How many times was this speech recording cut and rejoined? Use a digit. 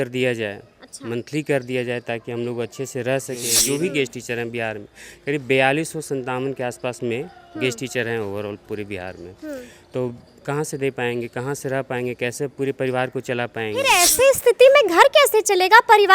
2